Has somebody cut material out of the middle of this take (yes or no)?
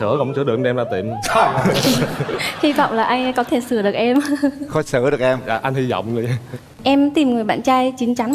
yes